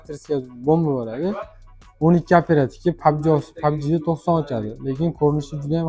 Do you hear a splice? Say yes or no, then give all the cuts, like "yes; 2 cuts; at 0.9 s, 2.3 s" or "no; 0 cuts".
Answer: no; 0 cuts